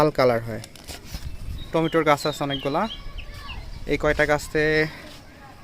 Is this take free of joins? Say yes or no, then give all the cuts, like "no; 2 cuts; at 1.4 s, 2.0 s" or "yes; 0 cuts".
no; 1 cut; at 1.6 s